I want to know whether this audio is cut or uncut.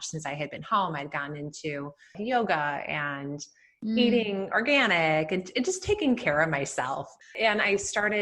cut